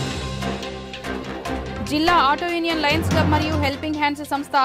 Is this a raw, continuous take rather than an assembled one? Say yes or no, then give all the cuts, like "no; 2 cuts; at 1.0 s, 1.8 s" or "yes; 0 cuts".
no; 1 cut; at 1.5 s